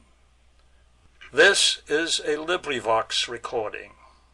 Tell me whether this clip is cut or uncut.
cut